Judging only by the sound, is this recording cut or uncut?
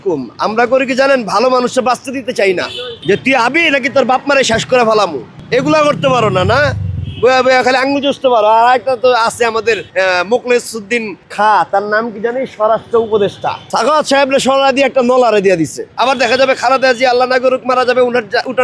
cut